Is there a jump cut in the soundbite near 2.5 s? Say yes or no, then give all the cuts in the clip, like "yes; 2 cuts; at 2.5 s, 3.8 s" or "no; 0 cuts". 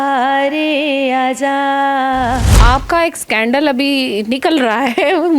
yes; 1 cut; at 2.5 s